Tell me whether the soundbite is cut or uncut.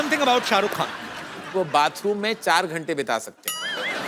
cut